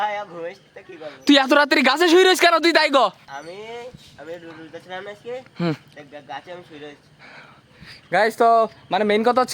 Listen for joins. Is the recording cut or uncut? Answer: cut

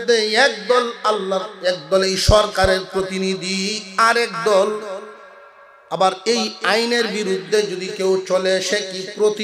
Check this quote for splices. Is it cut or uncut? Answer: uncut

